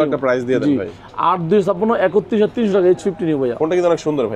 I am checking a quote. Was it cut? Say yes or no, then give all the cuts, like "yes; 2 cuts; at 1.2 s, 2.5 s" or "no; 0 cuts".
no; 0 cuts